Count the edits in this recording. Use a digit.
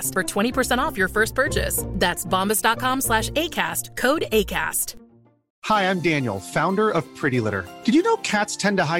1